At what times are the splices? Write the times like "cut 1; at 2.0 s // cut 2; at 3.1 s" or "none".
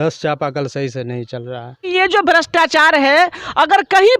cut 1; at 1.9 s